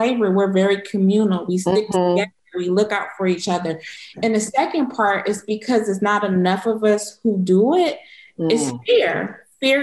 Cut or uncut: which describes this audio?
cut